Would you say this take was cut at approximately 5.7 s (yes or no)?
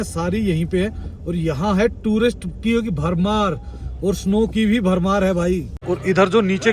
yes